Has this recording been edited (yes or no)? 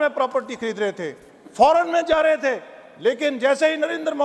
no